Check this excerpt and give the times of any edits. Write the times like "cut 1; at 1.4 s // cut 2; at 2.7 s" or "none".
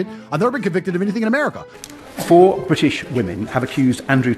cut 1; at 1.7 s